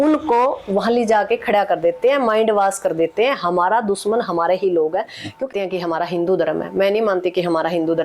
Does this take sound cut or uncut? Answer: cut